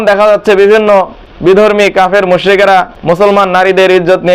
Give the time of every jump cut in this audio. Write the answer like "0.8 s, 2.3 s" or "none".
1.2 s, 2.6 s